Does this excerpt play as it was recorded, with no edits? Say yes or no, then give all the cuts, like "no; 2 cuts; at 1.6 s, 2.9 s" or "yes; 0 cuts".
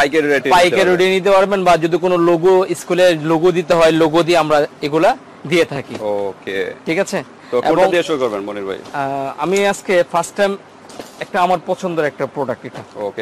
yes; 0 cuts